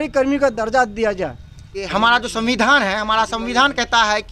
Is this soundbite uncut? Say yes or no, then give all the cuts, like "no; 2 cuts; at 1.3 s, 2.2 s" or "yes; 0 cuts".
no; 1 cut; at 1.9 s